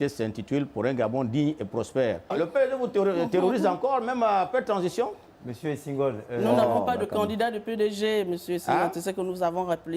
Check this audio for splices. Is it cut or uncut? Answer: cut